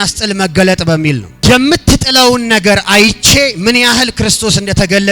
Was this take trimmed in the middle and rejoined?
yes; 1 cut; at 1.3 s

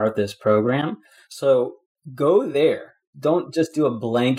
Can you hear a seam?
yes; 1 cut; at 3.1 s

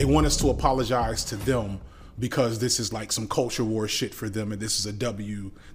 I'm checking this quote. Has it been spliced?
no; 0 cuts

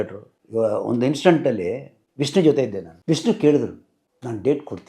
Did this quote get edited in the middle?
yes; 1 cut; at 2.9 s

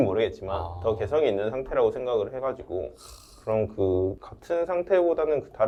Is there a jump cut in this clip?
no; 0 cuts

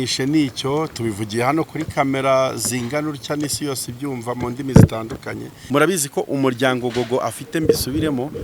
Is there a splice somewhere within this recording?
yes; 1 cut; at 5.6 s

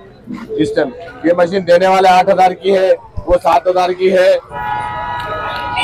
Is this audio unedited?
no; 1 cut; at 4.5 s

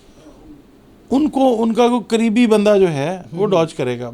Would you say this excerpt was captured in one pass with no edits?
yes; 0 cuts

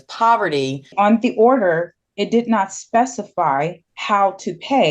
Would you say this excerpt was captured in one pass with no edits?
no; 2 cuts; at 0.9 s, 3.9 s

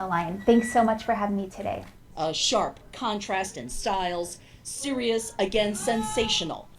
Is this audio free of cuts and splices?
no; 1 cut; at 3.0 s

